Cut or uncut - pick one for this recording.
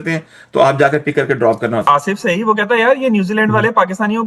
cut